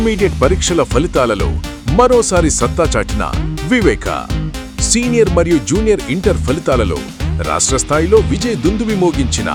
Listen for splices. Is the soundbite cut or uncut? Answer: uncut